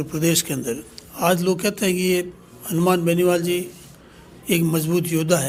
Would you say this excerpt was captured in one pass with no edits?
yes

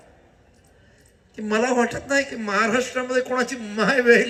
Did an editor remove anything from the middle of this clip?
no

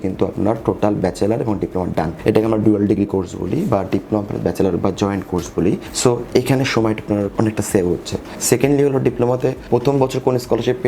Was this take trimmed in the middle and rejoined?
yes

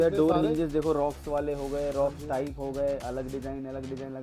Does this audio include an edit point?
no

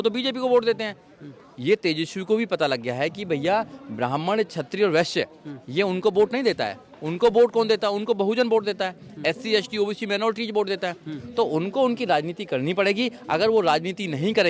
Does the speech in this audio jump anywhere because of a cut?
no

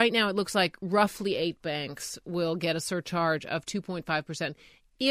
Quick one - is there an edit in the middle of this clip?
no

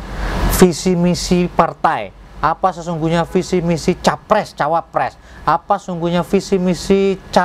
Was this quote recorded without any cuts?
yes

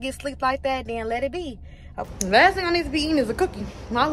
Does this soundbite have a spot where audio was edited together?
yes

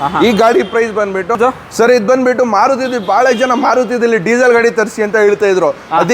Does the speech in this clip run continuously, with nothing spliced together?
no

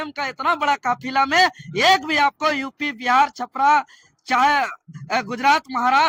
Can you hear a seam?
no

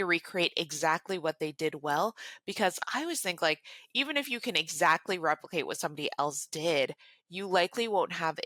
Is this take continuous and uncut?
yes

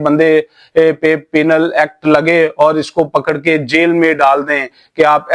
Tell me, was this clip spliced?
no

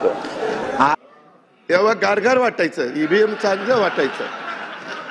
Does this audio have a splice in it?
yes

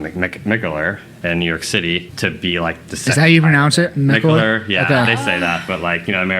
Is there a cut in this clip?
yes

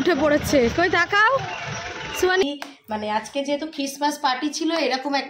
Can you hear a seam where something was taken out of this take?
yes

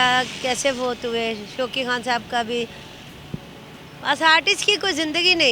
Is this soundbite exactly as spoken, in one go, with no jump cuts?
yes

